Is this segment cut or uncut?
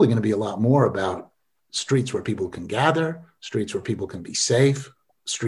uncut